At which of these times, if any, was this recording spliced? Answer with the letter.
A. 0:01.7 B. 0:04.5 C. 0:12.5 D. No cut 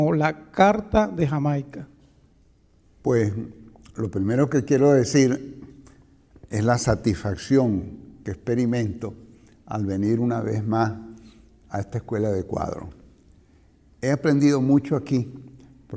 D